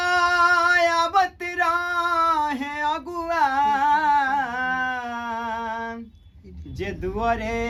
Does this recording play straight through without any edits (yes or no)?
yes